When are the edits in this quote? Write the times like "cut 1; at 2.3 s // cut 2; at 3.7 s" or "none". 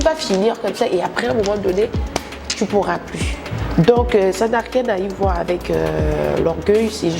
none